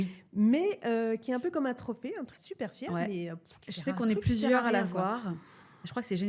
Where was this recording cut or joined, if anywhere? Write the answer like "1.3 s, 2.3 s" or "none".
2.3 s